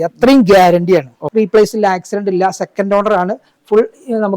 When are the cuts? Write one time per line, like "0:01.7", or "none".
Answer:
0:01.2